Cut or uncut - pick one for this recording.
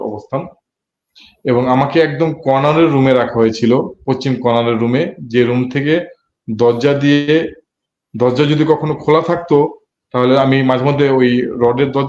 uncut